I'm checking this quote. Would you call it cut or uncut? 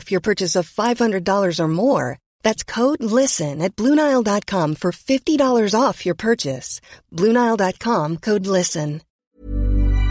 cut